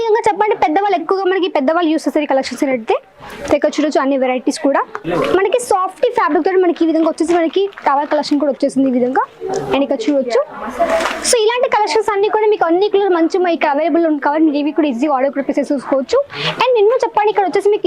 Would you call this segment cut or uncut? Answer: cut